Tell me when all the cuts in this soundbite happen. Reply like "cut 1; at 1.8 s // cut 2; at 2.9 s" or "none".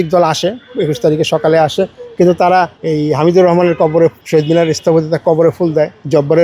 cut 1; at 2.8 s // cut 2; at 4.2 s